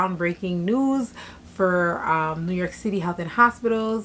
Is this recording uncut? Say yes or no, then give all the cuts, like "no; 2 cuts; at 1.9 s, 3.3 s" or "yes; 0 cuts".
yes; 0 cuts